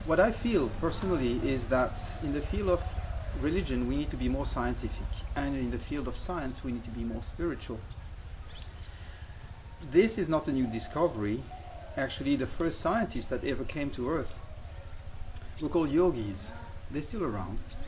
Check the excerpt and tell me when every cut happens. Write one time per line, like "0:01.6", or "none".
0:05.1